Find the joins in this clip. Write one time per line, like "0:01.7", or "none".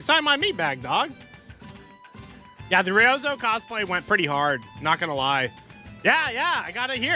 none